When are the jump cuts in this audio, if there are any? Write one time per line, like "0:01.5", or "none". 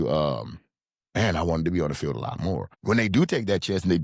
0:02.7